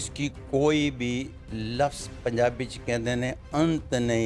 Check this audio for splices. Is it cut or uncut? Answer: uncut